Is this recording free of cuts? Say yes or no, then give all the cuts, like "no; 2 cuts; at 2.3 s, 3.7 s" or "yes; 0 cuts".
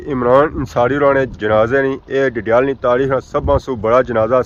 yes; 0 cuts